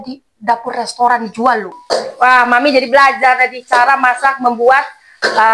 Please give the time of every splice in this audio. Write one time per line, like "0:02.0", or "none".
0:01.7